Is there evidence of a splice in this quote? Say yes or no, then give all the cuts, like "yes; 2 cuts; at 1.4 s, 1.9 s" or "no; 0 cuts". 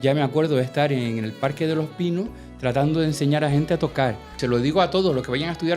yes; 1 cut; at 4.4 s